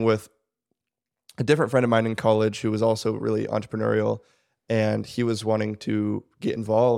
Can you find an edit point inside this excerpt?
no; 0 cuts

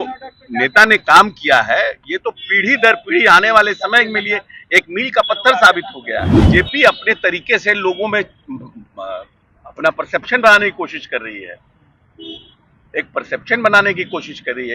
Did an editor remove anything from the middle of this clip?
yes; 1 cut; at 6.5 s

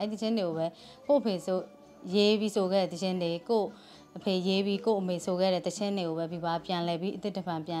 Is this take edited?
no; 0 cuts

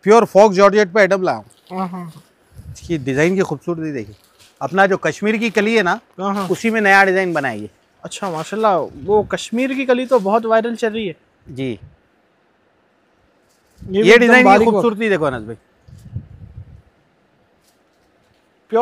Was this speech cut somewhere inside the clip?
no; 0 cuts

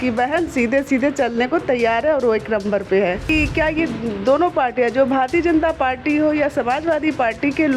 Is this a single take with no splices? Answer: no; 1 cut; at 3.3 s

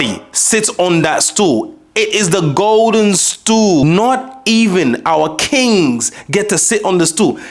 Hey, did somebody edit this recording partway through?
no; 0 cuts

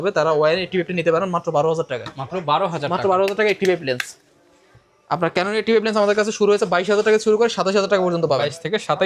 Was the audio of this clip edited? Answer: no; 0 cuts

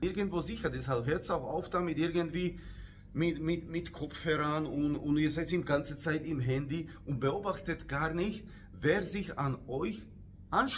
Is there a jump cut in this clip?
no; 0 cuts

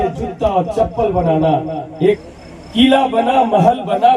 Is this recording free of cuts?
no; 1 cut; at 2.2 s

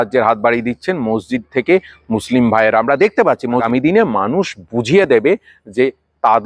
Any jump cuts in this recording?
yes; 1 cut; at 3.6 s

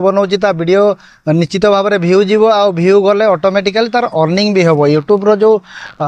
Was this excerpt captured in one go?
yes; 0 cuts

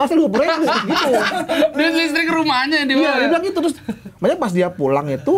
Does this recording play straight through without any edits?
yes; 0 cuts

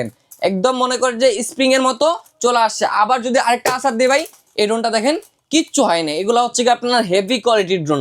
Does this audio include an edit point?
no; 0 cuts

